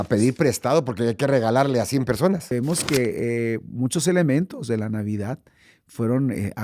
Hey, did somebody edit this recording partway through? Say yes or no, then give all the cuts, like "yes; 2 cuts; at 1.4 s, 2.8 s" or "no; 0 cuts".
yes; 1 cut; at 2.5 s